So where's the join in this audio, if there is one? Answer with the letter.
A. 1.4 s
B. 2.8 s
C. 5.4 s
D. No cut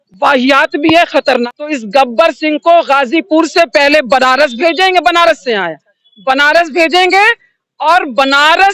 A